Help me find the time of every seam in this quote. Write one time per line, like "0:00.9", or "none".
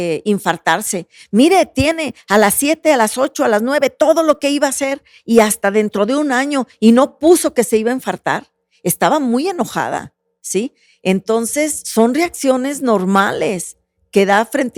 none

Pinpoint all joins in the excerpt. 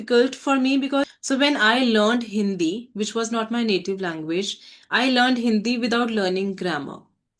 0:01.1

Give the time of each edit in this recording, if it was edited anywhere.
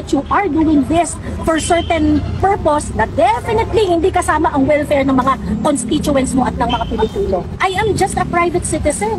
0:07.6

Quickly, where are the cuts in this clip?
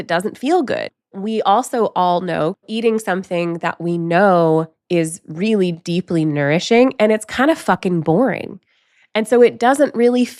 0:01.0
0:02.6

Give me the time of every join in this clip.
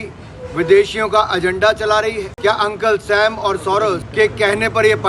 0:02.3
0:04.1

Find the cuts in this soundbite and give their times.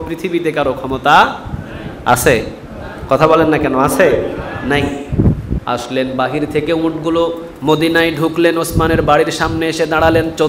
0:05.5

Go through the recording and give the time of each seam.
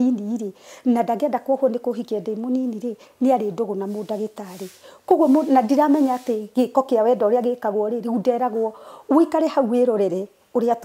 none

